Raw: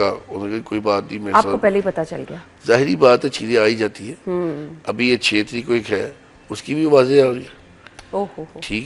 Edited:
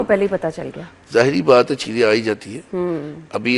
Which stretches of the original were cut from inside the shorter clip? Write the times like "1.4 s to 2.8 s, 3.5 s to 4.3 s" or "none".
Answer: none